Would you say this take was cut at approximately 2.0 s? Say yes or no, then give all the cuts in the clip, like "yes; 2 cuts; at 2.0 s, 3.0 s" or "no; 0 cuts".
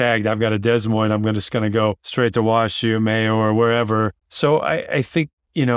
yes; 2 cuts; at 2.0 s, 4.2 s